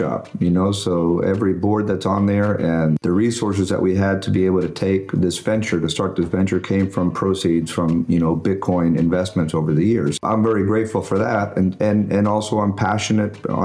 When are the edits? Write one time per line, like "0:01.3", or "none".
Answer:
0:03.0
0:10.2